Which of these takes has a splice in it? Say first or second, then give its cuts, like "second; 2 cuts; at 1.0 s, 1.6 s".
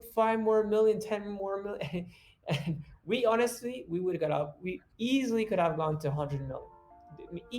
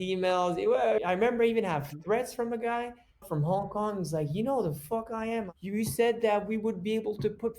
second; 3 cuts; at 1.0 s, 3.2 s, 5.5 s